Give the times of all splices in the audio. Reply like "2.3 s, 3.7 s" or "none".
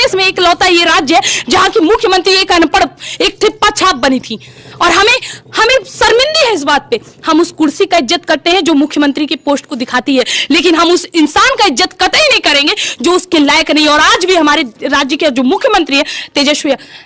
none